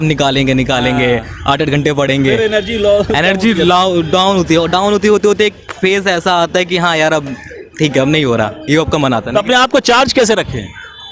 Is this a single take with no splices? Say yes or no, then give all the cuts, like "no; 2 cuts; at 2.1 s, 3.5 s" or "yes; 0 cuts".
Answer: yes; 0 cuts